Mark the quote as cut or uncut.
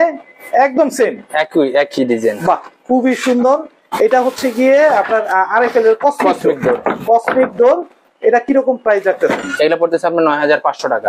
uncut